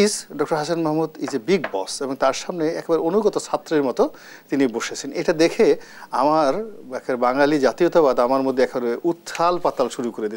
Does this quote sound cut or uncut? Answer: uncut